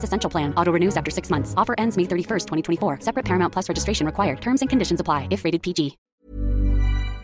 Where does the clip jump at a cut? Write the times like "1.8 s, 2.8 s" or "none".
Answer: 6.0 s